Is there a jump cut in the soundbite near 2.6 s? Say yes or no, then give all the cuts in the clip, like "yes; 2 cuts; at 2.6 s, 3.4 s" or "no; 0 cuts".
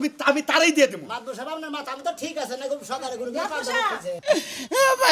no; 1 cut; at 4.1 s